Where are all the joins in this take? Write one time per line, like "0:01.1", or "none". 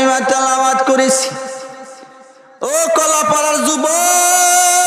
none